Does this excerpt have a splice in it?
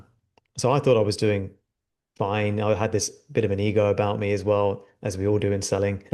no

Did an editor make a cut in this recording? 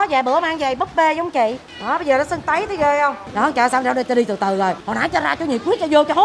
yes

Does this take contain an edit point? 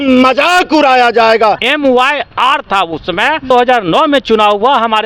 yes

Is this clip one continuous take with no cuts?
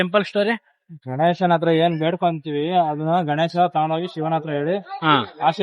yes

